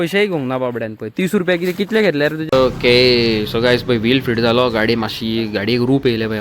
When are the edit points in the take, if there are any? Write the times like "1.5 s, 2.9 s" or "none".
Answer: 2.4 s